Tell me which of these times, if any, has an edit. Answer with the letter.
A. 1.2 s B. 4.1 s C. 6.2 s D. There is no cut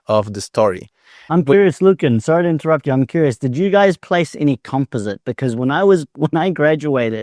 A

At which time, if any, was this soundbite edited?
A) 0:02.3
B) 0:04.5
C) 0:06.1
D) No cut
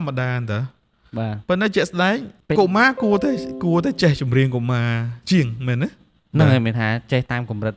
A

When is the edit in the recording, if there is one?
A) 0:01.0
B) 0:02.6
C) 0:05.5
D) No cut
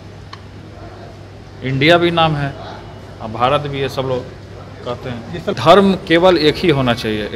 C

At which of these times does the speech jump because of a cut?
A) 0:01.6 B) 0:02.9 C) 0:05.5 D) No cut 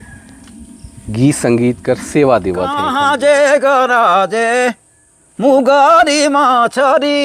B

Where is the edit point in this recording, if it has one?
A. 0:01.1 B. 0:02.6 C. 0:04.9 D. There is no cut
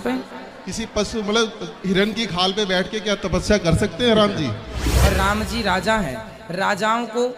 C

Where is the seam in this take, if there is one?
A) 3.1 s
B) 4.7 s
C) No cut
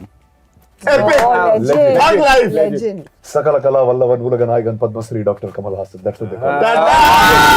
A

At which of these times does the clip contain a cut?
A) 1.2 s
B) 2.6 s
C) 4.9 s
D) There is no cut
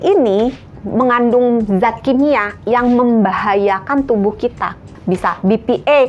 C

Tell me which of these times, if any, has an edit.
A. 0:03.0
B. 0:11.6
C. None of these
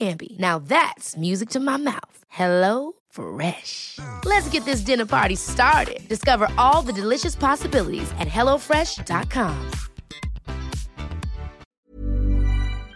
B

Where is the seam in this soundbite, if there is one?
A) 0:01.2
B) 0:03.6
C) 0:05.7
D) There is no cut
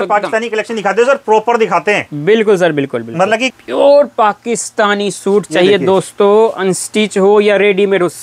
B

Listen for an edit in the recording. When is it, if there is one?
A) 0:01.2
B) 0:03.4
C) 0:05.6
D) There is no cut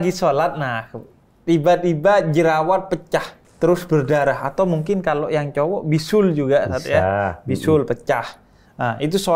B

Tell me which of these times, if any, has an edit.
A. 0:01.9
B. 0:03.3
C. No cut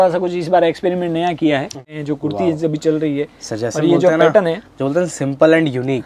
A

